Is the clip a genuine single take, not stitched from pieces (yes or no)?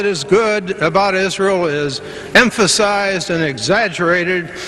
no